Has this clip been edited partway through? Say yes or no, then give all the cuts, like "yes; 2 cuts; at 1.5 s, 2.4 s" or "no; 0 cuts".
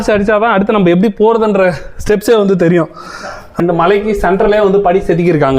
yes; 1 cut; at 3.5 s